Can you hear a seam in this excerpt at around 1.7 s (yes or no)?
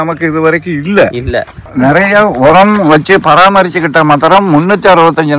yes